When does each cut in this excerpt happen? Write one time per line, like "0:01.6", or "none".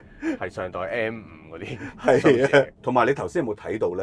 0:02.7